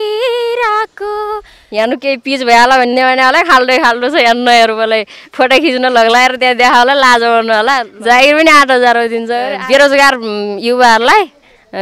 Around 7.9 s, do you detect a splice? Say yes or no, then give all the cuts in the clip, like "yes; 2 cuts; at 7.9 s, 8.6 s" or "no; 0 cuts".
yes; 3 cuts; at 1.6 s, 7.9 s, 9.6 s